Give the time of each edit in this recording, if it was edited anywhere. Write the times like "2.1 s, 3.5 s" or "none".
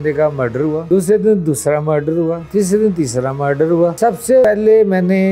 0.8 s, 2.4 s, 4.4 s